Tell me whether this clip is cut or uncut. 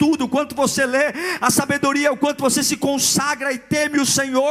uncut